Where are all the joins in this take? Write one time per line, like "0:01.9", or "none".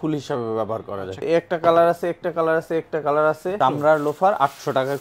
0:01.2
0:03.5